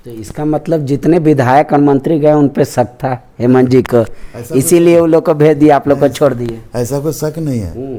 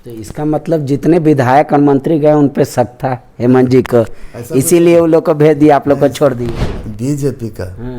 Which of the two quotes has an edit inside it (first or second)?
second